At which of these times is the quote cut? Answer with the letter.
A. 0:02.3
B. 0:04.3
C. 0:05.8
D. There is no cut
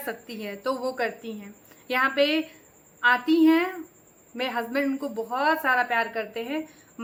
D